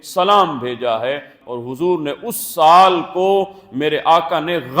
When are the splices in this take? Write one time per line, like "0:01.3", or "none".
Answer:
0:01.3